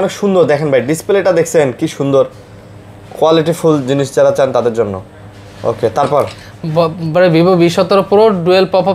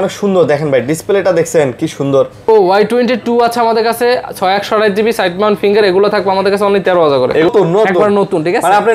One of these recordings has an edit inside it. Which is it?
second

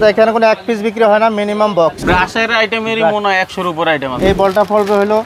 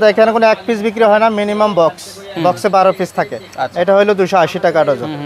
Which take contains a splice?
first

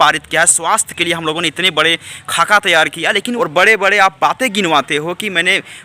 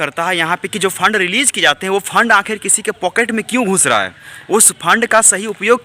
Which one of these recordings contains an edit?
first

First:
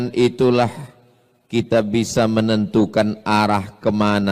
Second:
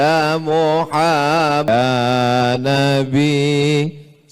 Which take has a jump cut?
second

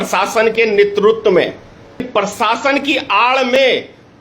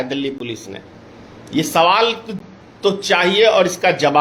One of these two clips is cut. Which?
first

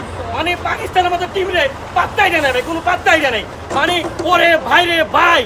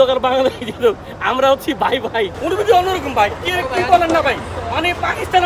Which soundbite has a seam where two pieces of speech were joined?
second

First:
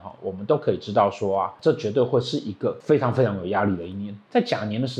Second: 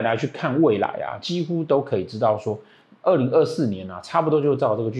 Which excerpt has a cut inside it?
first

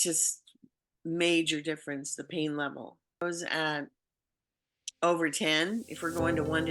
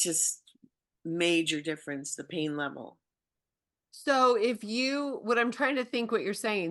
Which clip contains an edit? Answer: first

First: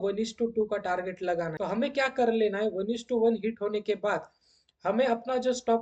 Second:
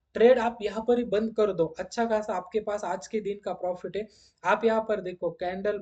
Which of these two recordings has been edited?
first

